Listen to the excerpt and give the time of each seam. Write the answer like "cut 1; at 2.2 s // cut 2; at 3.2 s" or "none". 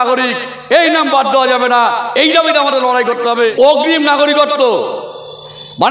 cut 1; at 3.5 s